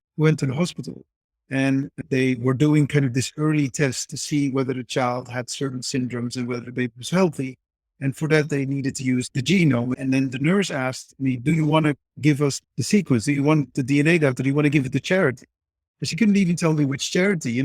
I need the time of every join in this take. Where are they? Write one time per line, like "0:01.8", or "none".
0:02.0
0:09.3
0:09.9
0:12.6